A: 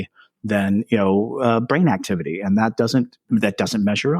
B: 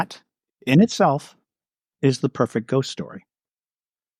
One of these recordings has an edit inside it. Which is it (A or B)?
A